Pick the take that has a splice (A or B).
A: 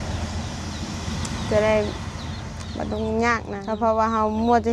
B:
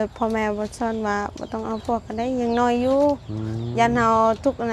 A